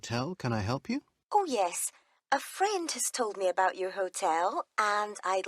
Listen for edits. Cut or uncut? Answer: cut